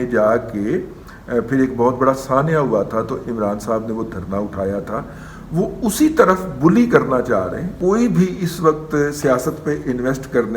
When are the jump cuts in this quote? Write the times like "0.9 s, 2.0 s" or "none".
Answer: 7.7 s